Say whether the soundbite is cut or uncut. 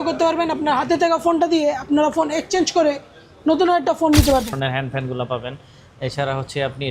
cut